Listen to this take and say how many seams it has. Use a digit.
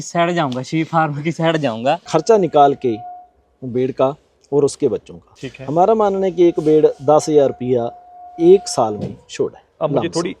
1